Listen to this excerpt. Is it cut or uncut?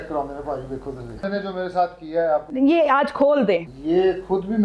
cut